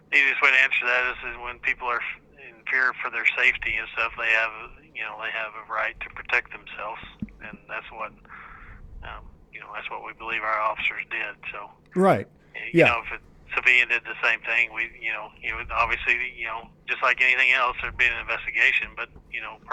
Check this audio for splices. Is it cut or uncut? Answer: uncut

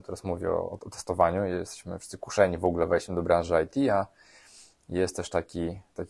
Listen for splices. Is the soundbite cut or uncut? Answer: uncut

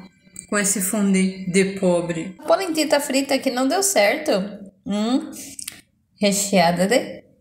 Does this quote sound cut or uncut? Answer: cut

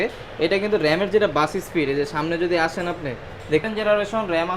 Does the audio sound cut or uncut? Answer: cut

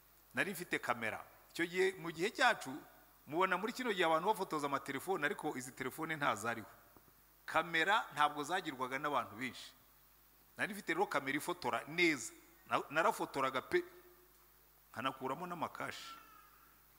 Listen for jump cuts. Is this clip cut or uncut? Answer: uncut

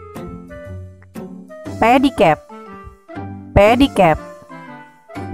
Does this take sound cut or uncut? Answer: uncut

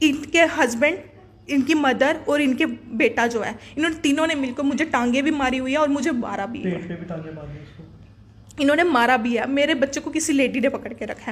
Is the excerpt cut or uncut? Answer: uncut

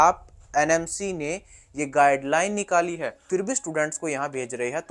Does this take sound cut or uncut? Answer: cut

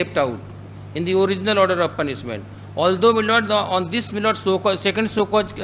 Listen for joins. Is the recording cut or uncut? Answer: uncut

